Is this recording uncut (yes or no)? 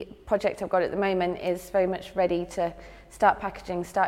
yes